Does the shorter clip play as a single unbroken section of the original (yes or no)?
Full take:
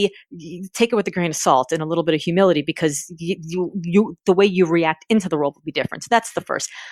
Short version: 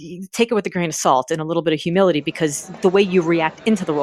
no